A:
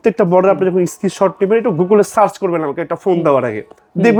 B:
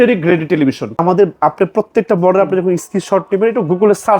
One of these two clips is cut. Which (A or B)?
B